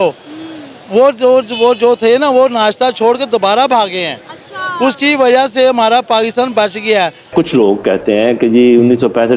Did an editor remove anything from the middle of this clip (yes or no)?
yes